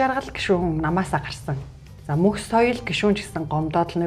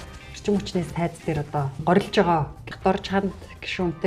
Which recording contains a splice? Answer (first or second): second